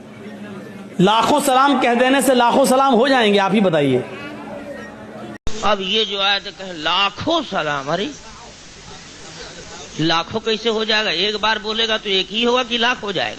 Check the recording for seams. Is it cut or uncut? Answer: cut